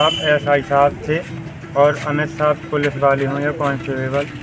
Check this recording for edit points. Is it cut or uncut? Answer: uncut